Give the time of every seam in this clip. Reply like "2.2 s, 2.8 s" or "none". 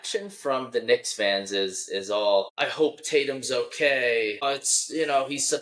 2.5 s, 4.4 s